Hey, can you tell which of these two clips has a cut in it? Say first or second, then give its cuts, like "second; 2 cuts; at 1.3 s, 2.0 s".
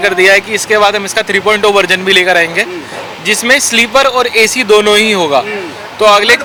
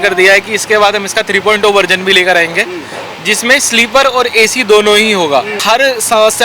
second; 1 cut; at 5.6 s